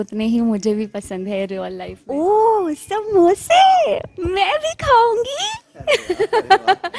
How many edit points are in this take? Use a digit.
1